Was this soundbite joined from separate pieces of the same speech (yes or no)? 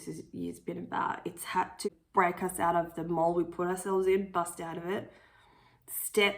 yes